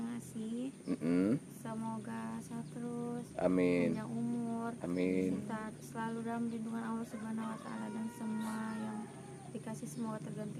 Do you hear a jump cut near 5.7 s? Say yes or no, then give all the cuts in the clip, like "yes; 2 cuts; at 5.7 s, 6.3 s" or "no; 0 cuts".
no; 0 cuts